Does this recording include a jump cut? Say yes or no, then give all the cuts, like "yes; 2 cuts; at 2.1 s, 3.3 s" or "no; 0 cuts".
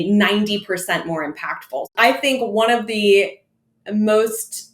yes; 1 cut; at 1.9 s